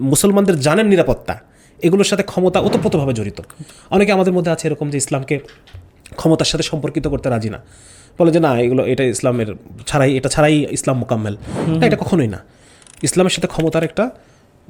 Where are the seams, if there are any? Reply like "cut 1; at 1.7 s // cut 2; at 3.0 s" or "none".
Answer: none